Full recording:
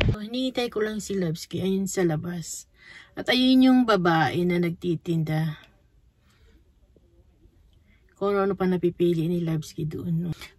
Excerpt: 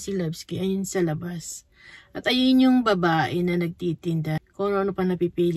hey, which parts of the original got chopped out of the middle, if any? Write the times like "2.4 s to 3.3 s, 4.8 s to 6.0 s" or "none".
5.4 s to 8.0 s